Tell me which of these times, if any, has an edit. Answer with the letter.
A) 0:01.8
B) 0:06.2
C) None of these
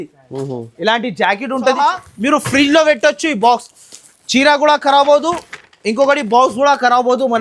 A